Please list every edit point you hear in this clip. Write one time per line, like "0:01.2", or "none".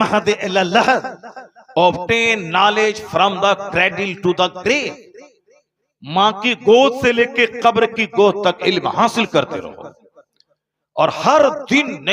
none